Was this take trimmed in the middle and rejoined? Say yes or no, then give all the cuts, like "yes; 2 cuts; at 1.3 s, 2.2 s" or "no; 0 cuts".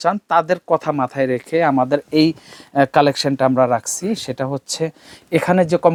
no; 0 cuts